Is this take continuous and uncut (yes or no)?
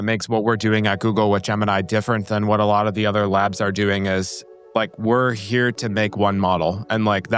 yes